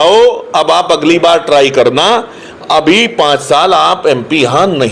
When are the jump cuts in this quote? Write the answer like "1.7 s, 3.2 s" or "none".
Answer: none